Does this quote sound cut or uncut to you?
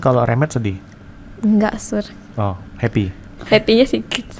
cut